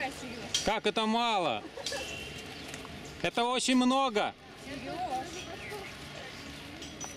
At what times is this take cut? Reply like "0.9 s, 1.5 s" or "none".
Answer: none